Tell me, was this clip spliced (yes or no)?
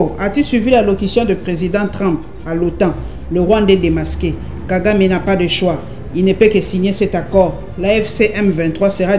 no